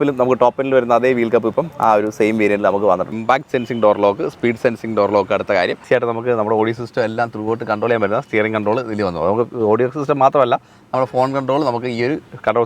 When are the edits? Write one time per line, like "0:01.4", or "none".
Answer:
0:03.1
0:05.8